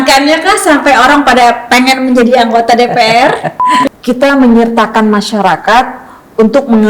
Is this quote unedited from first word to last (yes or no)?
no